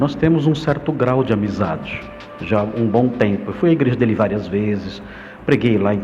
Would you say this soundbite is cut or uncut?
uncut